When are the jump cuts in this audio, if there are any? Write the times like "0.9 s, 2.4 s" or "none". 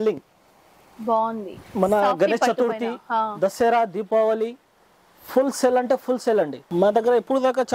6.6 s